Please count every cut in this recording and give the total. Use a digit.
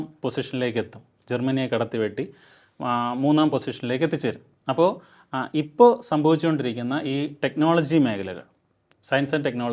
0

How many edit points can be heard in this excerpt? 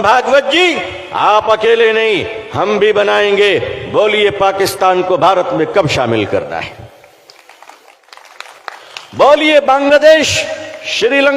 1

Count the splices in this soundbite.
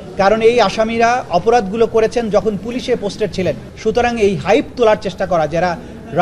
1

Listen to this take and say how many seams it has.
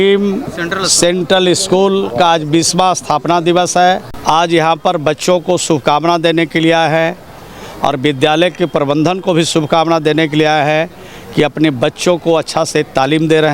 1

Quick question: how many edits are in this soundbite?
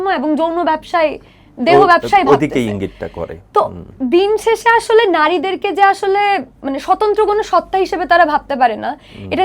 0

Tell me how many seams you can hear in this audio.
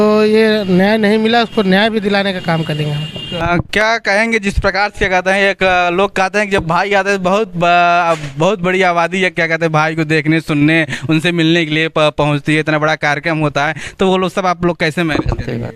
0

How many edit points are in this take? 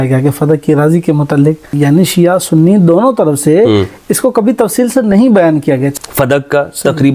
2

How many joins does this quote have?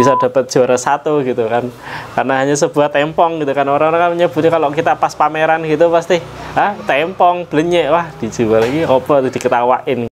0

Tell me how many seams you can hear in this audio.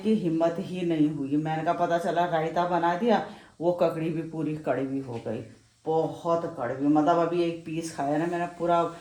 0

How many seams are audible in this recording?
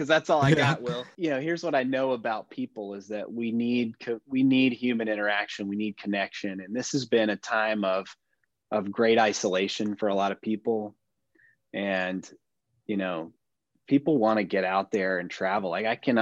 1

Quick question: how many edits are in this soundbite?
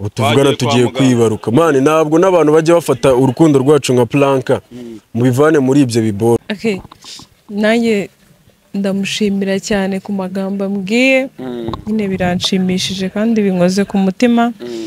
1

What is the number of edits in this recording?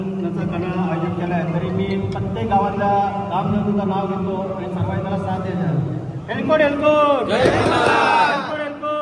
0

